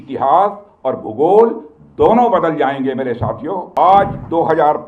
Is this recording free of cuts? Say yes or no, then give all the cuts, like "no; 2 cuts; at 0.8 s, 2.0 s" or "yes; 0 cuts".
no; 1 cut; at 3.8 s